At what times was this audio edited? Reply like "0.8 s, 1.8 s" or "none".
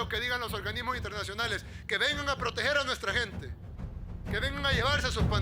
3.4 s